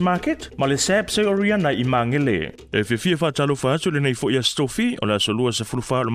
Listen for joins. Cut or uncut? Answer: cut